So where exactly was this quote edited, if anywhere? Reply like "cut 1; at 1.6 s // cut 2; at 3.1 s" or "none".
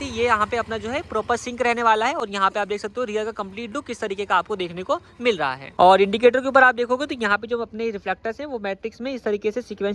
none